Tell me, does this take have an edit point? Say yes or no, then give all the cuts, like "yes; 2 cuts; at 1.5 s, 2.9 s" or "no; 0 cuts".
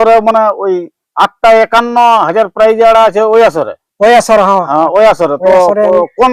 no; 0 cuts